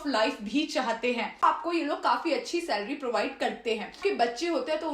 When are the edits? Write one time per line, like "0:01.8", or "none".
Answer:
0:01.4
0:04.0